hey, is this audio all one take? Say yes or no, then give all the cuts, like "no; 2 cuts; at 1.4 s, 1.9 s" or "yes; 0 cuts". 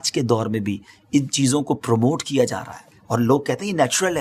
yes; 0 cuts